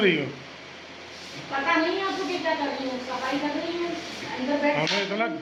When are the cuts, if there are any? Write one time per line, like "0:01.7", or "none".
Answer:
none